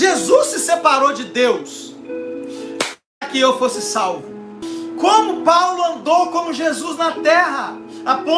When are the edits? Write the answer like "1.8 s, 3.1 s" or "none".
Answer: 4.6 s